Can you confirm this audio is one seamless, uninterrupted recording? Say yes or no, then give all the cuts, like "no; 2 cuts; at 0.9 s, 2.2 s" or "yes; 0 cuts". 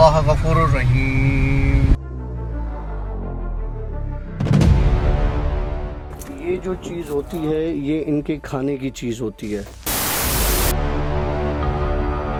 yes; 0 cuts